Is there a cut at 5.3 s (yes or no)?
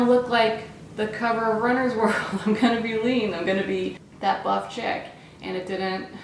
no